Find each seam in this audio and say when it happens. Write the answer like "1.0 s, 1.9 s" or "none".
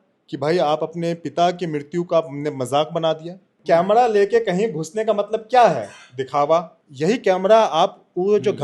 3.5 s, 6.8 s